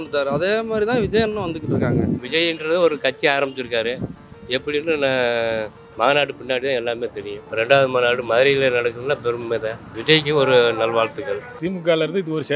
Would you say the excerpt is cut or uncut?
cut